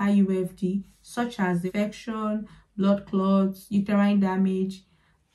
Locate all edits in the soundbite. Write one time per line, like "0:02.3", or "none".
0:01.6